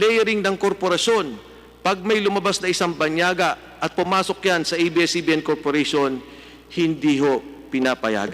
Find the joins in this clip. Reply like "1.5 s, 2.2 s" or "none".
none

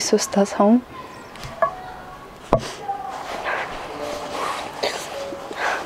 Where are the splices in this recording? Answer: none

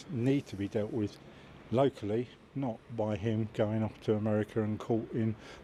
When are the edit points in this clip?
none

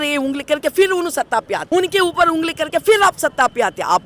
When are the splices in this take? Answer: 1.6 s

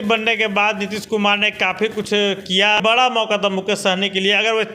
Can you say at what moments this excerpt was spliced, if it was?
2.8 s

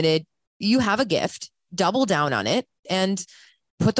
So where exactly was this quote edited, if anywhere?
2.8 s

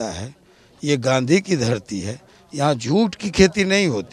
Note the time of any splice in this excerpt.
none

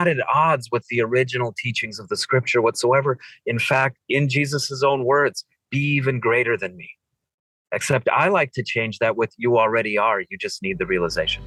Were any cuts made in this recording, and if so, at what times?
none

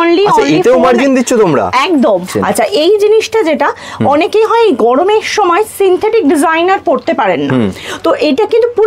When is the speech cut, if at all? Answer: 2.3 s

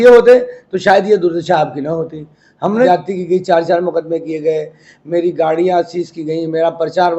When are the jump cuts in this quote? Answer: 2.9 s

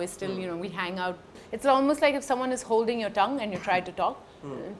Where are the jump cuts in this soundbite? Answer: 1.4 s

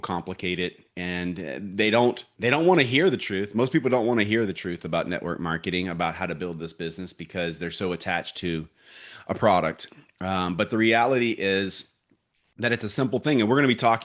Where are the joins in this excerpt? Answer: 2.3 s

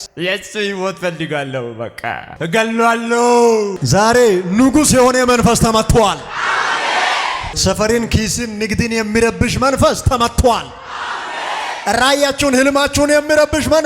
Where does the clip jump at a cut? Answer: 2.3 s, 3.8 s

